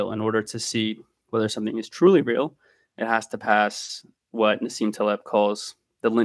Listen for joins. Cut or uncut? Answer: uncut